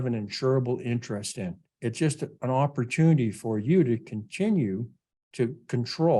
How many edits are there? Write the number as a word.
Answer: one